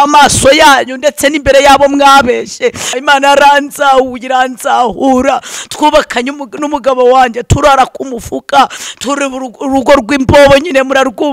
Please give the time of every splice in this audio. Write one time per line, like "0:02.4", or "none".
0:02.9